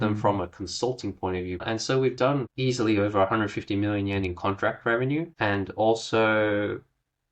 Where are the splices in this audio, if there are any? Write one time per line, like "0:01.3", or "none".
0:01.6
0:02.5
0:05.3